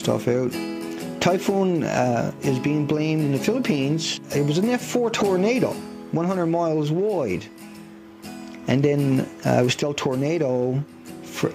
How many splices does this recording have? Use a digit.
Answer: 1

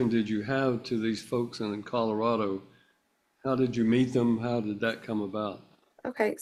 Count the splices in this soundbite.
0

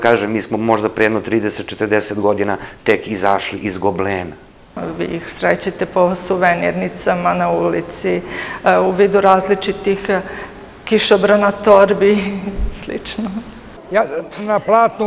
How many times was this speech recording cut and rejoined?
2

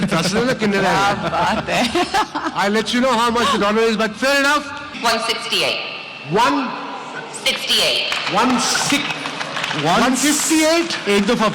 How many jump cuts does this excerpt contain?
1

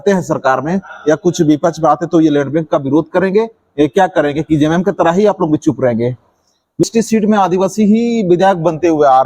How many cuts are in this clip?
1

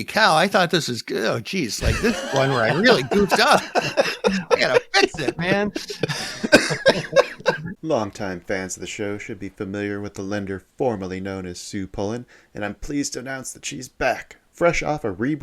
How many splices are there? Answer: 1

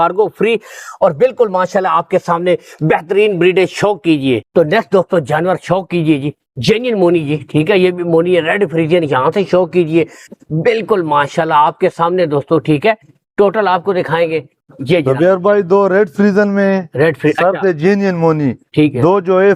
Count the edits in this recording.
0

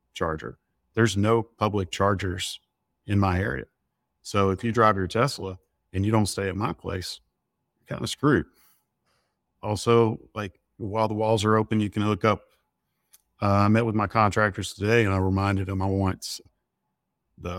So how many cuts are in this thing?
0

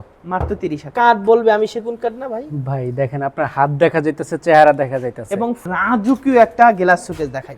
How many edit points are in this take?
2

